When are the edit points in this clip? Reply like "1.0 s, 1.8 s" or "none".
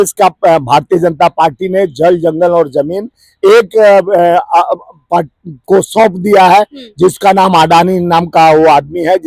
none